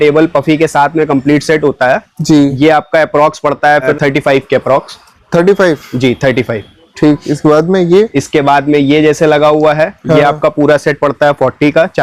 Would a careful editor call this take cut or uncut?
uncut